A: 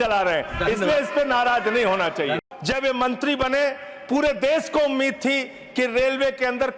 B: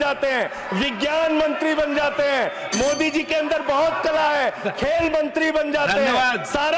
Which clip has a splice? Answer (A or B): A